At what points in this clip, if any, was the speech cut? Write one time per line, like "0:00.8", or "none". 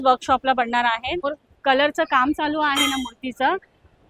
0:01.2